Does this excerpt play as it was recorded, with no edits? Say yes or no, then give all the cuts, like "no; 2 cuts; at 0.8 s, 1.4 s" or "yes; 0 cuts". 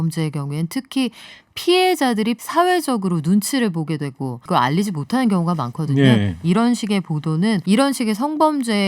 no; 3 cuts; at 2.4 s, 4.4 s, 7.6 s